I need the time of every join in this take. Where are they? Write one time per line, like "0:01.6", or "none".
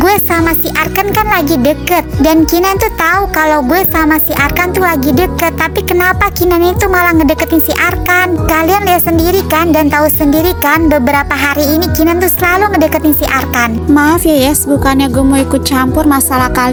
none